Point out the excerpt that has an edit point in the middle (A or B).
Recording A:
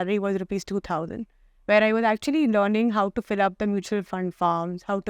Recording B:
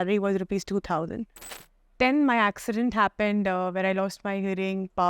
B